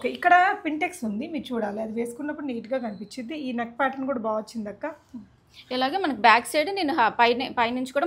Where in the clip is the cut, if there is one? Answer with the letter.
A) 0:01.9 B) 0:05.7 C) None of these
C